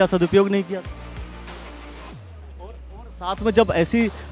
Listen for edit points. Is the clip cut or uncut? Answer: uncut